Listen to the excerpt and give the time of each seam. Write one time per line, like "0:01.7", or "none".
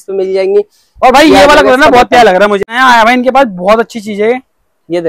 0:02.7